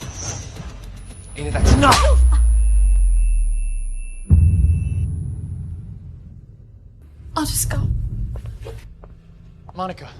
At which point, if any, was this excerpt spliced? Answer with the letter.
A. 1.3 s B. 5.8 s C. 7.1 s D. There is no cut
C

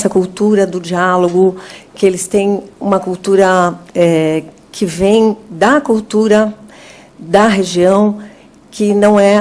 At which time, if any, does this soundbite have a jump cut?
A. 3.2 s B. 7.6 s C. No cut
A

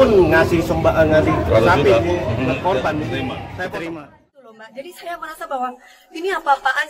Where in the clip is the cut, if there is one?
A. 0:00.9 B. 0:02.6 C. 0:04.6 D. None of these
C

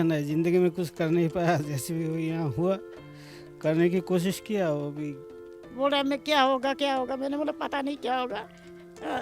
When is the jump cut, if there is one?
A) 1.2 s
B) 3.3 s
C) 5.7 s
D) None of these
C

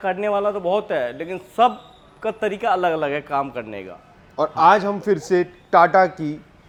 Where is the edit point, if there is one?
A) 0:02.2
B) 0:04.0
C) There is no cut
C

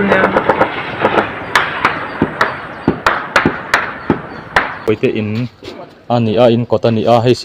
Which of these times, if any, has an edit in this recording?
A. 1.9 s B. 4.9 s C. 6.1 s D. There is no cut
B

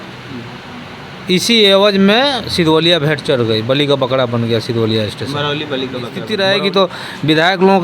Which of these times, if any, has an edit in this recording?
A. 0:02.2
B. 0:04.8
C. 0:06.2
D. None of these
C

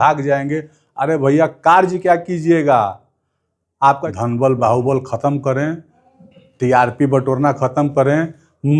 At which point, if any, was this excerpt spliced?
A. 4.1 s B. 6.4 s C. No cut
A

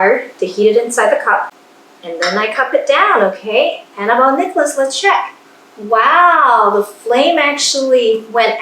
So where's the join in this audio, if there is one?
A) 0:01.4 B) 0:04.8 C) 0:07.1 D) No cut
A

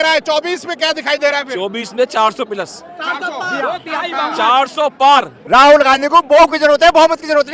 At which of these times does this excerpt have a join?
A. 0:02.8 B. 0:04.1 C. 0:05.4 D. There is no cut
C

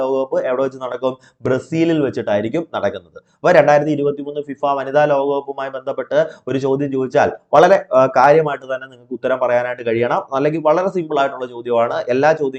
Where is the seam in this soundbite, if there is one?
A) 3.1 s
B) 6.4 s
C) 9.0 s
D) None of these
D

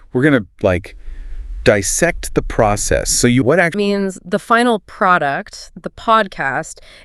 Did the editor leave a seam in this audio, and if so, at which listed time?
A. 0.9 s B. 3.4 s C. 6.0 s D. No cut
B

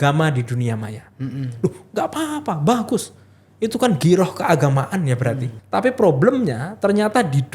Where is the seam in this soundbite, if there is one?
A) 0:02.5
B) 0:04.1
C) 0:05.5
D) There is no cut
C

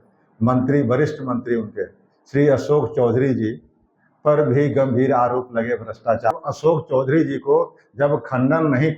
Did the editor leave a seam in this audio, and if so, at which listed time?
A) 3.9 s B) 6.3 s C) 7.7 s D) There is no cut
B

